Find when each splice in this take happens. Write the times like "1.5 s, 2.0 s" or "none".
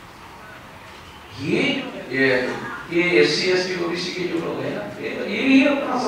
1.9 s